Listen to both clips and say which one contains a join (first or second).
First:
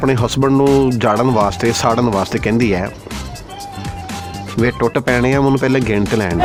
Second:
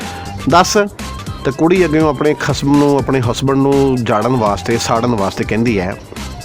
second